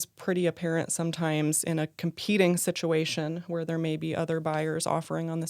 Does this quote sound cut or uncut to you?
uncut